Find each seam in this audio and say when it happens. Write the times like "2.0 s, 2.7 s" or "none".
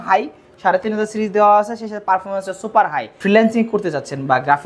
3.1 s